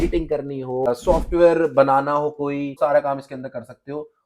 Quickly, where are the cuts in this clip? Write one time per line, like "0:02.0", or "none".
0:00.9
0:02.7